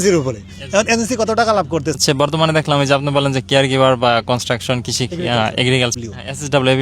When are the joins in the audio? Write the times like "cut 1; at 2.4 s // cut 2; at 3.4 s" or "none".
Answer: cut 1; at 2.0 s // cut 2; at 5.9 s